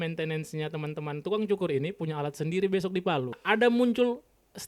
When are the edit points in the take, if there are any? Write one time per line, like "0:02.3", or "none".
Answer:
0:03.4